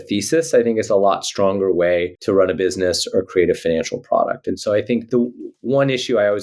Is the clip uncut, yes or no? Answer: no